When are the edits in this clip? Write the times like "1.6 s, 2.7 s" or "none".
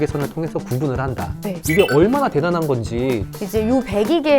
1.6 s, 3.3 s